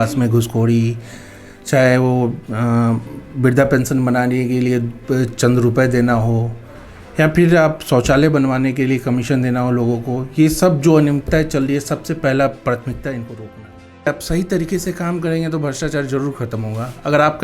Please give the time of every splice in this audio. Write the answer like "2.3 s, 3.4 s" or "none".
14.1 s